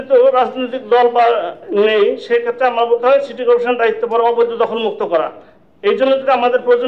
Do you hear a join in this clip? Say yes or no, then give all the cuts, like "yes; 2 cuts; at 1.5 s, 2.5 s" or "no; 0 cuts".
no; 0 cuts